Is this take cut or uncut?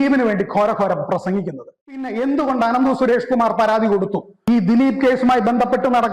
cut